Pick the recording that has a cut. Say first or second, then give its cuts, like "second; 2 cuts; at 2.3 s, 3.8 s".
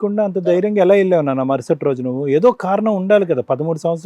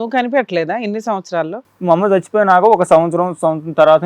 second; 1 cut; at 1.6 s